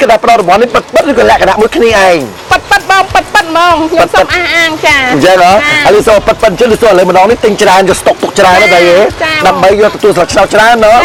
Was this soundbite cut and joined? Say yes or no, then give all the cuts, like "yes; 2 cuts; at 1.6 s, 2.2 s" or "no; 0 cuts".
no; 0 cuts